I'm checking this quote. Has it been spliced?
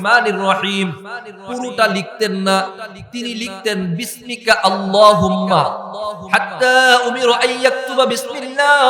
yes; 1 cut; at 6.2 s

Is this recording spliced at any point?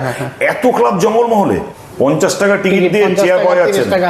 yes; 1 cut; at 1.7 s

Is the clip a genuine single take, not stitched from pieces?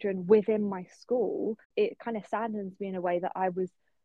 no; 1 cut; at 1.7 s

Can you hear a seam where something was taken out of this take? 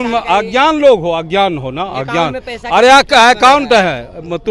no; 0 cuts

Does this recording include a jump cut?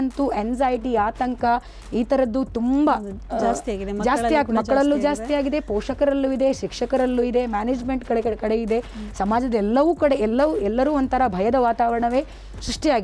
no; 0 cuts

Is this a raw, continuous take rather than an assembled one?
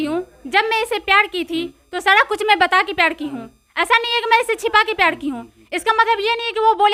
yes; 0 cuts

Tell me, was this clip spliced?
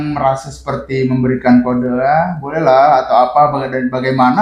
no; 0 cuts

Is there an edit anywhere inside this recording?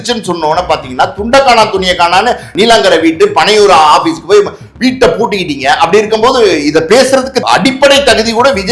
yes; 2 cuts; at 2.5 s, 7.4 s

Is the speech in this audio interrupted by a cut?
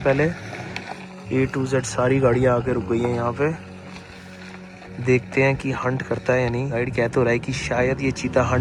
no; 0 cuts

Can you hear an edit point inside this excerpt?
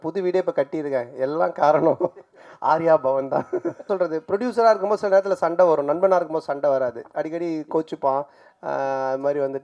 yes; 1 cut; at 3.9 s

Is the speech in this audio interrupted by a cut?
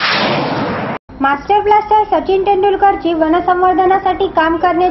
yes; 1 cut; at 1.0 s

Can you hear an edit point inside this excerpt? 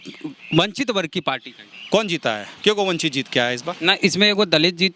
no; 0 cuts

